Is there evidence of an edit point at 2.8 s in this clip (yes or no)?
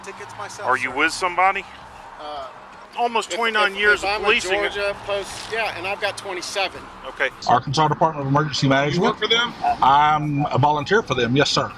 yes